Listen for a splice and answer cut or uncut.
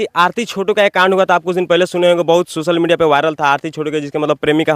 uncut